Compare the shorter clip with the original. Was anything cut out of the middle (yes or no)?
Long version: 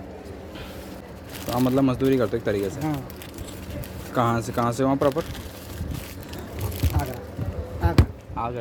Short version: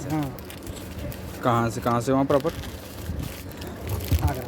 no